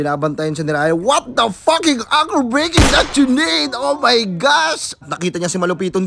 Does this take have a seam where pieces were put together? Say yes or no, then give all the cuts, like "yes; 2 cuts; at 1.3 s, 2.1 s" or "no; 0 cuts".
yes; 1 cut; at 5.0 s